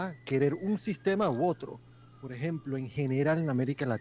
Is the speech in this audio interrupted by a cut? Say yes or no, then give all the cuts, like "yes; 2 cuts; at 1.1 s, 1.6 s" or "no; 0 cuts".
no; 0 cuts